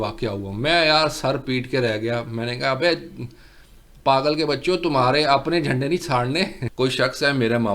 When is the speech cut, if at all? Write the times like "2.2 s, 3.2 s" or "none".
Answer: 6.6 s